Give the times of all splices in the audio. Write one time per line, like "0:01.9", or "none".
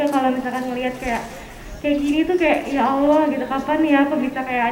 none